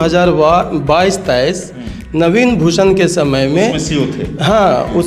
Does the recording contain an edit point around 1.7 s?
no; 0 cuts

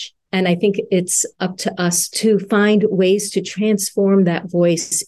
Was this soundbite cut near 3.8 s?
no; 1 cut; at 2.1 s

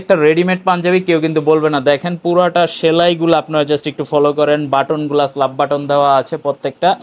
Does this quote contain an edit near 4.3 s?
no; 0 cuts

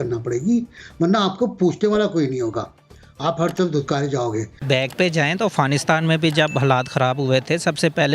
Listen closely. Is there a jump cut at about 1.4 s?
no; 1 cut; at 4.6 s

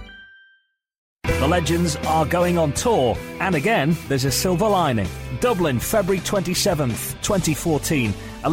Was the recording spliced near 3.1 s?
no; 1 cut; at 1.0 s

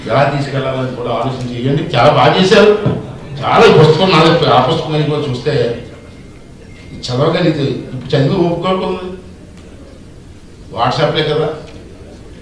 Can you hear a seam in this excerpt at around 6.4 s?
no; 1 cut; at 10.0 s

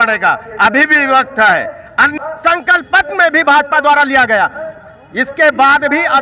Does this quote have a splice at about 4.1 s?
no; 1 cut; at 2.1 s

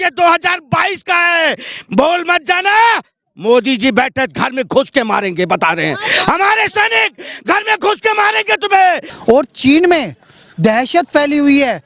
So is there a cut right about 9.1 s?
yes; 1 cut; at 9.1 s

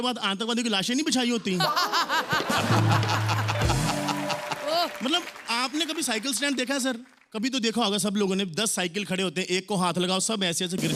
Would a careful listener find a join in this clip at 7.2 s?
no; 0 cuts

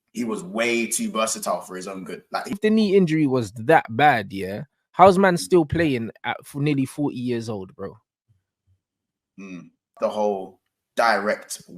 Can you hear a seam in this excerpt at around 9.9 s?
yes; 2 cuts; at 2.5 s, 9.9 s

